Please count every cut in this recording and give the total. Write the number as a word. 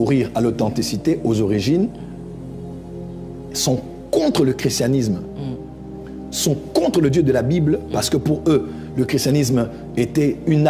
zero